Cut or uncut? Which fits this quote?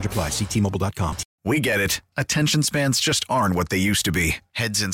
cut